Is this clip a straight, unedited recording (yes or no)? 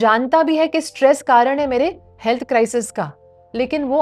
yes